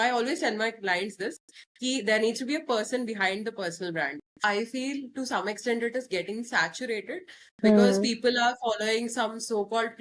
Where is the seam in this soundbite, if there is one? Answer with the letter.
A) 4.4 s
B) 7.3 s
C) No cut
A